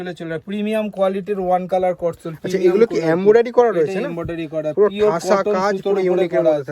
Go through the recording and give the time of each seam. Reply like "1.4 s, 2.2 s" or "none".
none